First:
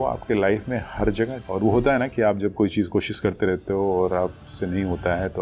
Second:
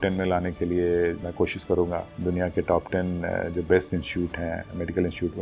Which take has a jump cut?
first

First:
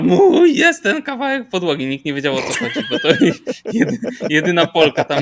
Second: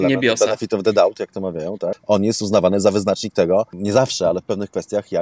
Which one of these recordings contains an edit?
second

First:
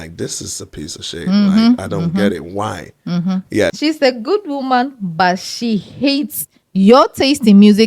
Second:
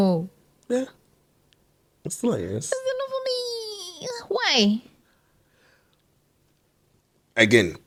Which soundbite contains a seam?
first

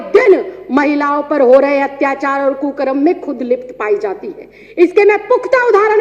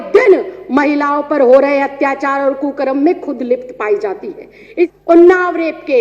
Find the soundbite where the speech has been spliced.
second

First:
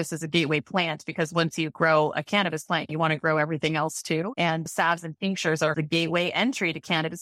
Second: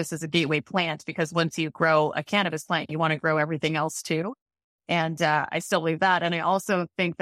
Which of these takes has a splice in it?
first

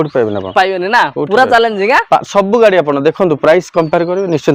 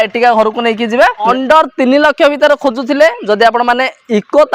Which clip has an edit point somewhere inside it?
second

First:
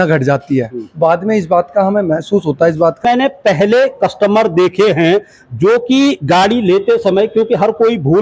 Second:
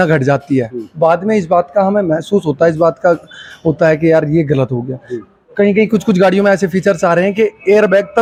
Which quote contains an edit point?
first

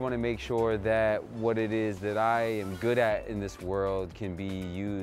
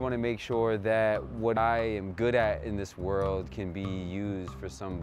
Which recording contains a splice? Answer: second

